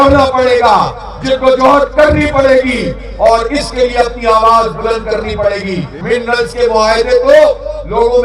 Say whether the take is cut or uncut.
cut